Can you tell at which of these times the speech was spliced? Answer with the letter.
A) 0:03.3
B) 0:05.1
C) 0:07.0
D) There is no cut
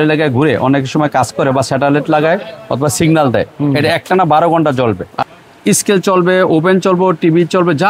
B